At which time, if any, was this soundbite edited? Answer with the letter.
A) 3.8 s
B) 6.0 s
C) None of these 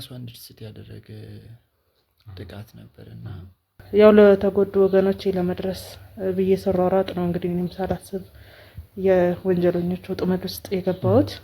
A